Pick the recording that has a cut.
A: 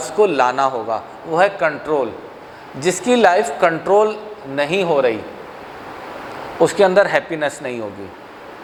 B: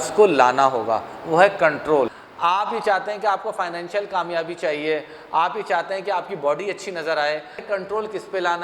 B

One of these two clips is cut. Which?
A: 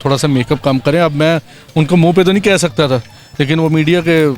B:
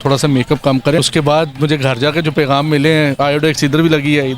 B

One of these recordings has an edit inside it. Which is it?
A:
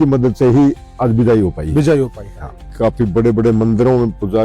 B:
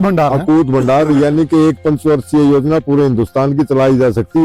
A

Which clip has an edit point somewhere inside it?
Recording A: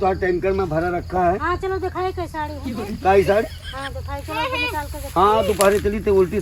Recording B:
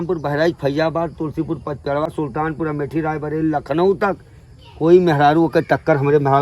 B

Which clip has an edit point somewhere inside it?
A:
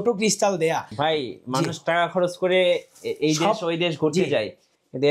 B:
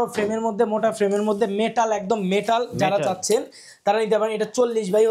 A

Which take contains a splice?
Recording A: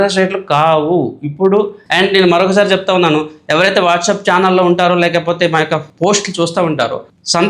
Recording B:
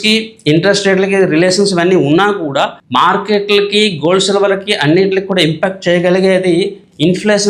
A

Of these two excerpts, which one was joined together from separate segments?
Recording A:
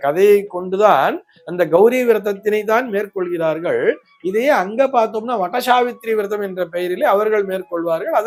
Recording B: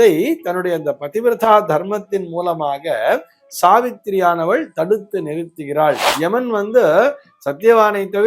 B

